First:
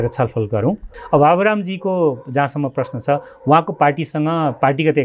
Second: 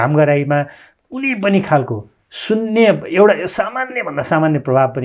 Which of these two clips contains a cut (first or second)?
first